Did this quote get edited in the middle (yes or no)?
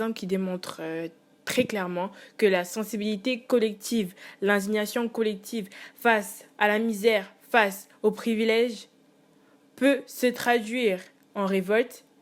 no